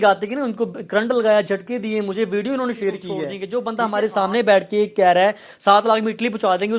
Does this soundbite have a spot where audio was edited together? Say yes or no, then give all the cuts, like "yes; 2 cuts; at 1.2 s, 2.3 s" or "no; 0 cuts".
yes; 1 cut; at 3.4 s